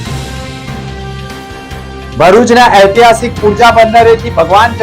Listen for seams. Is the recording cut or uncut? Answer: cut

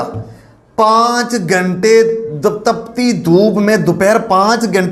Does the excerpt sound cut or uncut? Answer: uncut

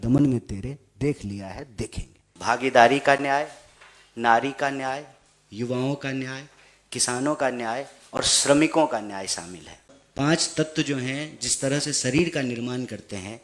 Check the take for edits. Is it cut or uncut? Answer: cut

